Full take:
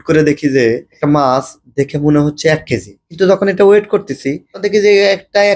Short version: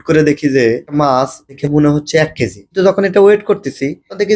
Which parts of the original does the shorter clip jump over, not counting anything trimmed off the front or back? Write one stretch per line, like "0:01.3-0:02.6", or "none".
0:01.1-0:01.4
0:02.9-0:03.0